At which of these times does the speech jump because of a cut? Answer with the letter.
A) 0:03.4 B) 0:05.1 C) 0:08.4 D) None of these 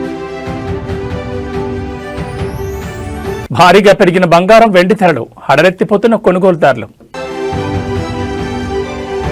D